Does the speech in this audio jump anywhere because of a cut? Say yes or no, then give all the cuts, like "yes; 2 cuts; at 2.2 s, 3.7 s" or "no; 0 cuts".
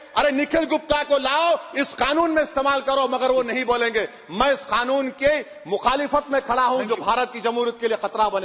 no; 0 cuts